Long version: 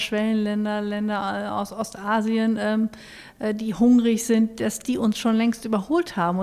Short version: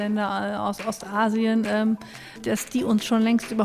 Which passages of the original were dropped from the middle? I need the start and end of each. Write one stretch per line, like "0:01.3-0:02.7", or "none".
0:03.3-0:04.6